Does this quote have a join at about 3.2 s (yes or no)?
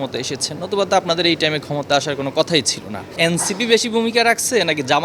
yes